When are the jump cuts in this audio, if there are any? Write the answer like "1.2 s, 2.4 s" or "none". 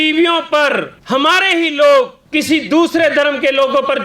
0.9 s, 2.2 s